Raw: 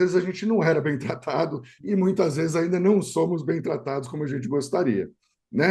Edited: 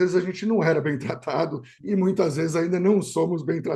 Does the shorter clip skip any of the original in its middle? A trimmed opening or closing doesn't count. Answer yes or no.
no